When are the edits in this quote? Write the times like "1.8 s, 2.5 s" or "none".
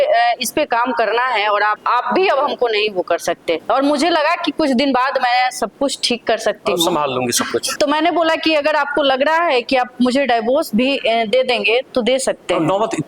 1.8 s, 3.6 s, 7.7 s